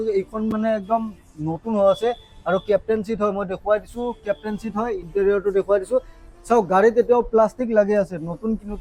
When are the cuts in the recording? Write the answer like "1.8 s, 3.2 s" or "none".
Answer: none